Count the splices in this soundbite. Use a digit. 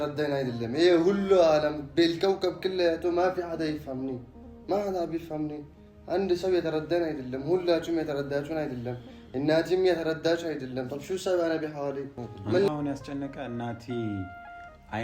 1